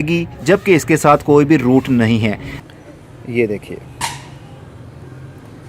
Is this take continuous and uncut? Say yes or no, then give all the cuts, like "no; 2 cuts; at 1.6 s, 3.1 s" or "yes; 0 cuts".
no; 1 cut; at 2.5 s